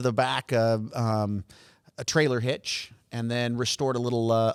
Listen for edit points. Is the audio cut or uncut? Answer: uncut